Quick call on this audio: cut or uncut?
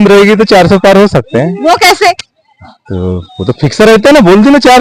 uncut